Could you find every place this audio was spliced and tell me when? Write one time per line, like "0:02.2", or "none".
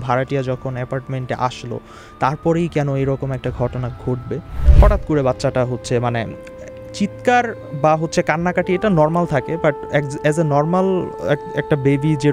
0:04.6